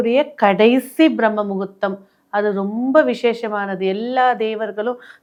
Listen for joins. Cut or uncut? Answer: uncut